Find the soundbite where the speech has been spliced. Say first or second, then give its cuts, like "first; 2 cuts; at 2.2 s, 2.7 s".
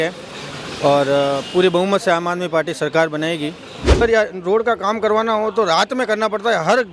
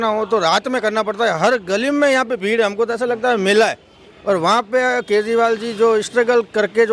first; 1 cut; at 4.0 s